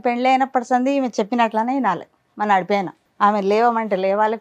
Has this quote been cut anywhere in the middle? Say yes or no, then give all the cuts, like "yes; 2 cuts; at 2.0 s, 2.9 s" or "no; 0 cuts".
yes; 1 cut; at 3.0 s